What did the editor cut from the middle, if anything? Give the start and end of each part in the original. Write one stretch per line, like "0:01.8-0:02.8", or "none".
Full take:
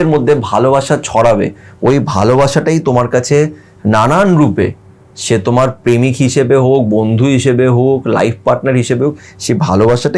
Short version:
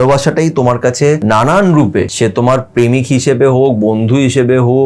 0:03.5-0:03.8
0:04.7-0:05.2